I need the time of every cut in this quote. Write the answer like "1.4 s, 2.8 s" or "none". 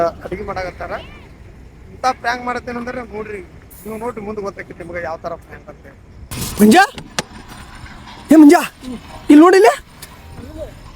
6.3 s